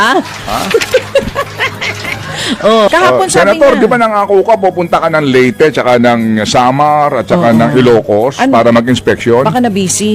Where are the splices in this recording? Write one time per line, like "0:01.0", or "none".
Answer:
0:02.9